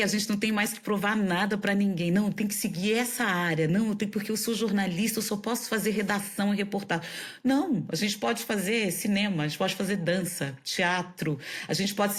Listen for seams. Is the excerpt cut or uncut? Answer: uncut